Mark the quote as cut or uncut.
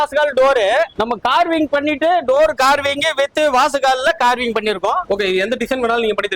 cut